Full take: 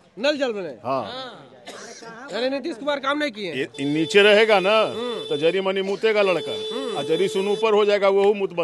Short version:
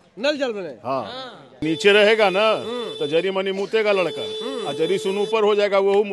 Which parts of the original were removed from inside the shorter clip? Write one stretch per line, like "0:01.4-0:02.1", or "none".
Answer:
0:01.6-0:03.9